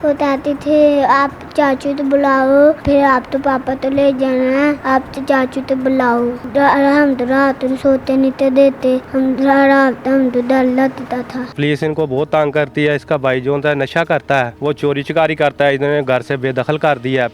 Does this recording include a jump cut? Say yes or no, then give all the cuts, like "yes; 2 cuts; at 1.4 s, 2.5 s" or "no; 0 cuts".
yes; 6 cuts; at 2.8 s, 4.8 s, 6.4 s, 9.1 s, 11.5 s, 14.5 s